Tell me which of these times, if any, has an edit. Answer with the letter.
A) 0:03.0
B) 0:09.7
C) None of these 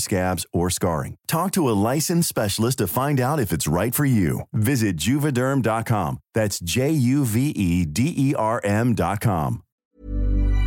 B